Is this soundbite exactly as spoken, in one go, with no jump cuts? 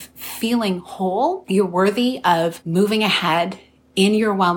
no; 2 cuts; at 1.4 s, 2.6 s

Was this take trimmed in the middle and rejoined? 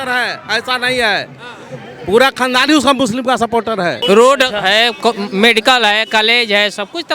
yes; 1 cut; at 4.0 s

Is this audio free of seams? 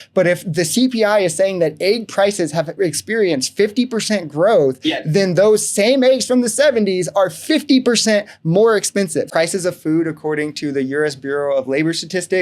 no; 1 cut; at 9.3 s

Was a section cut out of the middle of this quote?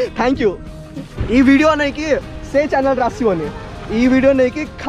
yes; 1 cut; at 1.2 s

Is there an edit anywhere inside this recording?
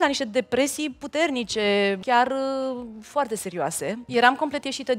yes; 2 cuts; at 2.0 s, 4.1 s

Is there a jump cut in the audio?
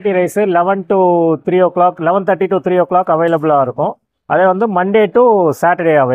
no; 0 cuts

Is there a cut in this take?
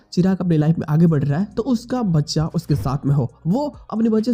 no; 0 cuts

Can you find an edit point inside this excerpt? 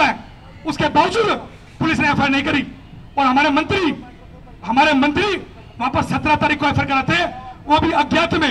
no; 0 cuts

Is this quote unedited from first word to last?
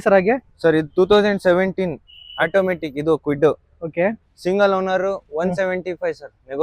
no; 1 cut; at 4.3 s

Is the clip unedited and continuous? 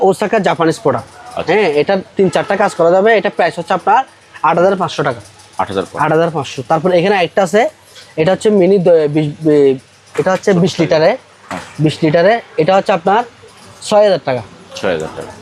yes; 0 cuts

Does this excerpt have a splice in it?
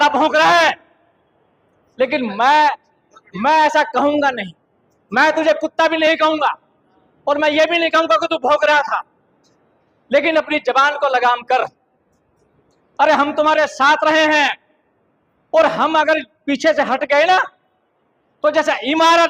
no; 0 cuts

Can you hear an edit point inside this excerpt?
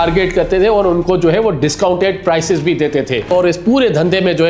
yes; 1 cut; at 3.3 s

